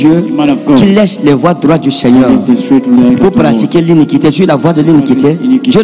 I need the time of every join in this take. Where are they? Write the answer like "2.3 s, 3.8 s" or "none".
none